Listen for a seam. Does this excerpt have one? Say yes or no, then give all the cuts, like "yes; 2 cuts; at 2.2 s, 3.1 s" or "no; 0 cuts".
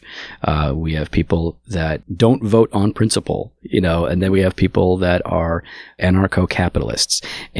yes; 2 cuts; at 2.1 s, 5.8 s